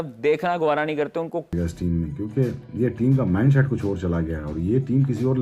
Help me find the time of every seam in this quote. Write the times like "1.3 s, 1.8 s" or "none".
1.5 s